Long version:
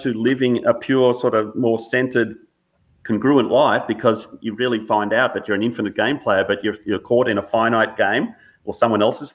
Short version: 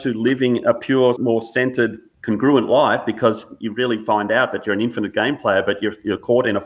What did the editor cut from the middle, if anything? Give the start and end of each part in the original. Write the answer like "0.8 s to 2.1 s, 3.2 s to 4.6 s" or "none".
1.2 s to 1.5 s, 2.4 s to 2.9 s